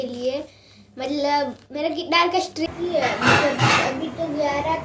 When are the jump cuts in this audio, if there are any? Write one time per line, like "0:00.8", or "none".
0:02.7